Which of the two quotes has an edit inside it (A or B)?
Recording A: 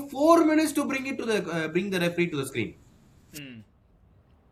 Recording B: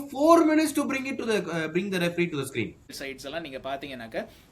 B